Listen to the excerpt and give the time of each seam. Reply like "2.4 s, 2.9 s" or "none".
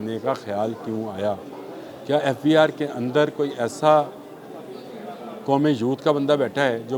none